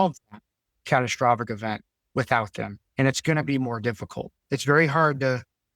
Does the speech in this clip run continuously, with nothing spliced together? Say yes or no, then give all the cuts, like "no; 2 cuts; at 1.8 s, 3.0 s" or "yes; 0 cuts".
no; 1 cut; at 4.4 s